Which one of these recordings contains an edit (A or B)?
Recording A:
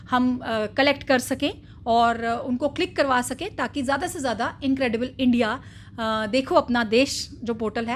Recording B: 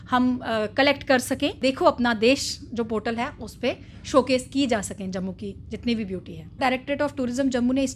B